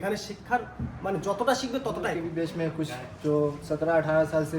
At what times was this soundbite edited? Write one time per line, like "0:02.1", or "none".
0:02.1

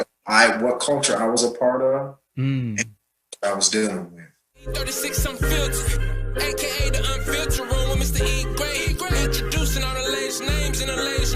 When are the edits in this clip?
0:04.7

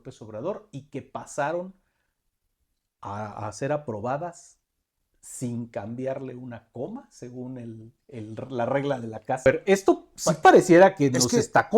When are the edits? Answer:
0:09.5

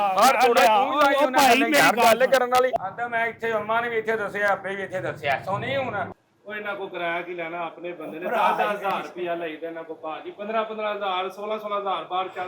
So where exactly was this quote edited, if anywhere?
0:02.7
0:06.1

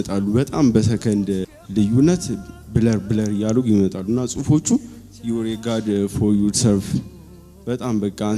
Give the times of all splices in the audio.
0:01.5

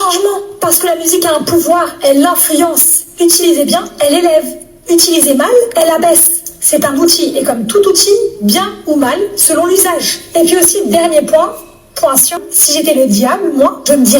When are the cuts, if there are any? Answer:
0:12.5

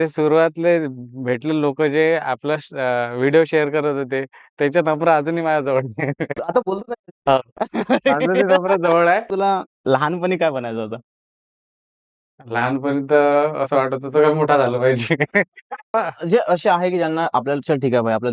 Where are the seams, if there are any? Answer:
0:09.3
0:15.9

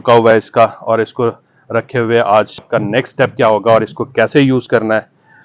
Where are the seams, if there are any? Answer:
0:02.7

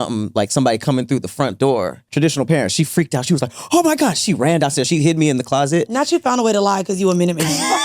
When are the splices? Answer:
0:02.0
0:04.9

